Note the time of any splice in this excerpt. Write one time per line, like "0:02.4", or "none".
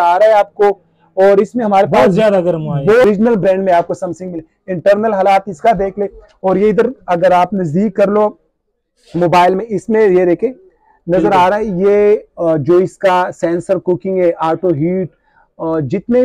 0:03.0